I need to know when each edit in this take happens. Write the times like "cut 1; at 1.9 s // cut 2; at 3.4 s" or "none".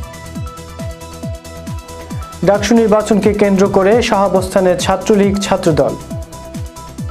none

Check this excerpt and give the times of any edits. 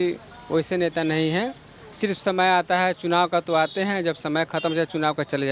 none

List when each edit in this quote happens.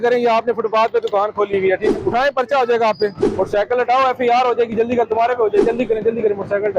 cut 1; at 1.9 s // cut 2; at 3.2 s // cut 3; at 5.6 s

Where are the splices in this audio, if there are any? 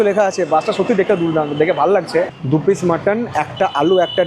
cut 1; at 2.4 s

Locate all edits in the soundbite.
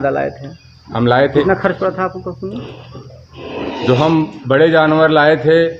cut 1; at 1.4 s

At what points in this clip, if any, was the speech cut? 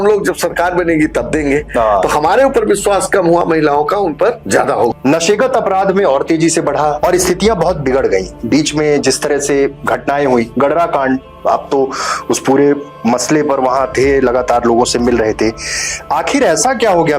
cut 1; at 4.5 s // cut 2; at 7.0 s

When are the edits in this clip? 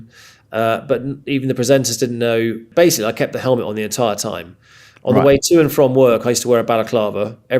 cut 1; at 2.7 s

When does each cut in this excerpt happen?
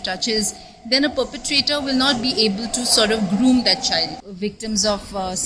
cut 1; at 4.2 s

